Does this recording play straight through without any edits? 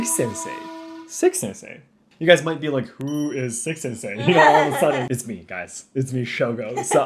no; 1 cut; at 5.1 s

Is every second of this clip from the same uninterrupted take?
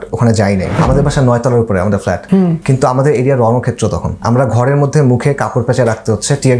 no; 3 cuts; at 0.8 s, 2.4 s, 4.1 s

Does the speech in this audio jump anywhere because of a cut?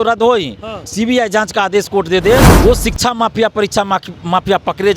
yes; 1 cut; at 2.5 s

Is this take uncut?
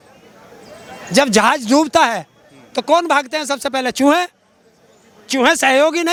yes; 0 cuts

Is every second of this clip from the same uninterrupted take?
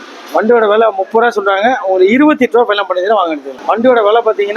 no; 1 cut; at 3.5 s

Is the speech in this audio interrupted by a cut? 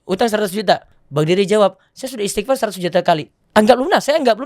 yes; 2 cuts; at 1.0 s, 3.3 s

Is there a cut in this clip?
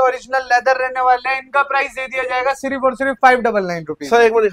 no; 0 cuts

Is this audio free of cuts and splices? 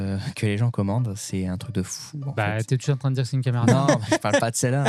yes; 0 cuts

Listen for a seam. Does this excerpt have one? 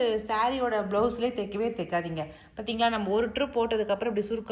no; 0 cuts

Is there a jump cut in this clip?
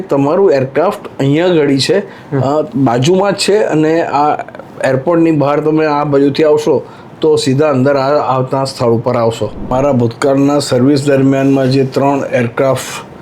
yes; 1 cut; at 9.7 s

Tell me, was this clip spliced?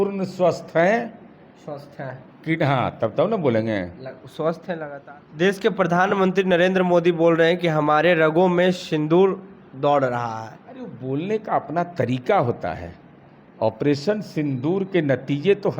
yes; 1 cut; at 4.9 s

